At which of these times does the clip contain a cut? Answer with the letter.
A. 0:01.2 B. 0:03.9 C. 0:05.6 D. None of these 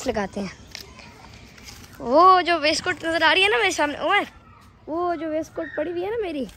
D